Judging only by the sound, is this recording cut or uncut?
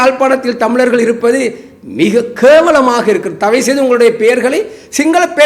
uncut